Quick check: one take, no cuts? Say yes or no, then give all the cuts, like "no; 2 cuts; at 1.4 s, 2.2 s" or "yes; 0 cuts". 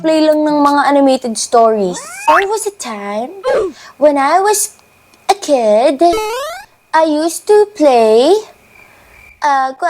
no; 1 cut; at 2.3 s